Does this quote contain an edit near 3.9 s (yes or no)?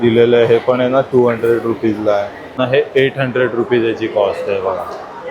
no